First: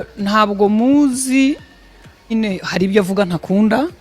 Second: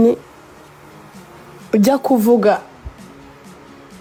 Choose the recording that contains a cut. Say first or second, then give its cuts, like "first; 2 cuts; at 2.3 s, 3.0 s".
first; 1 cut; at 2.3 s